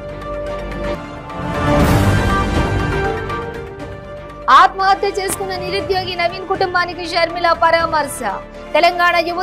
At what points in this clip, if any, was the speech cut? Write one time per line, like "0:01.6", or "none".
none